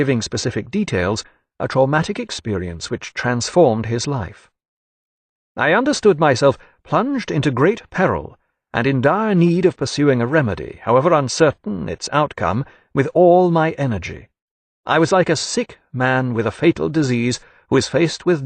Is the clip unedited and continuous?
no; 1 cut; at 3.4 s

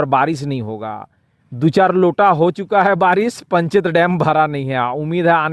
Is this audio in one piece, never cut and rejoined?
yes; 0 cuts

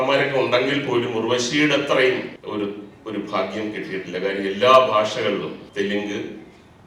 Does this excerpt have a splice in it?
yes; 2 cuts; at 2.4 s, 5.6 s

